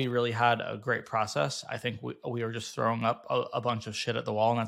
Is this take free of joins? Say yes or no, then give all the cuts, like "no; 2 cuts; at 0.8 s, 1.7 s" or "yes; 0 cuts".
yes; 0 cuts